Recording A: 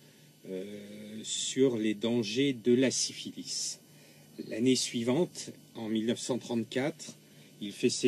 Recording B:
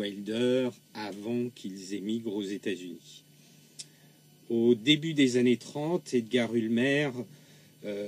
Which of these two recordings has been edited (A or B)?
B